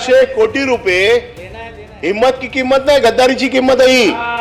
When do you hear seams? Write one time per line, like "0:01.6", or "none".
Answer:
none

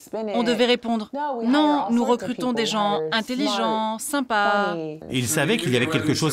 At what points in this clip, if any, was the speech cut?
0:05.0

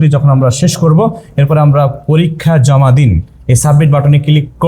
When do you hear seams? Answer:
none

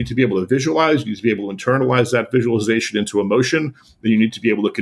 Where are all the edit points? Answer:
none

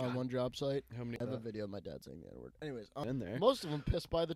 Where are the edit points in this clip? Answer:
0:01.2
0:03.0

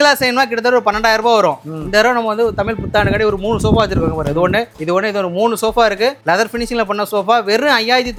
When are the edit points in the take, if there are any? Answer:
none

